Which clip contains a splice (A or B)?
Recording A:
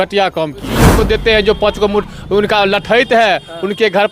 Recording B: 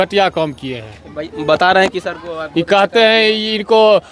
A